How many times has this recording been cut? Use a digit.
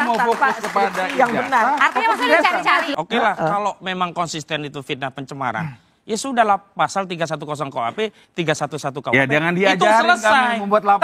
1